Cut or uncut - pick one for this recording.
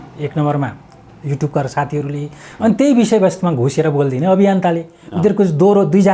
uncut